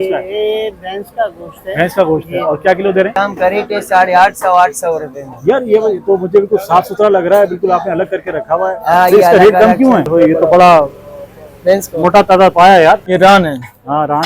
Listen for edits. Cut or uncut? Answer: cut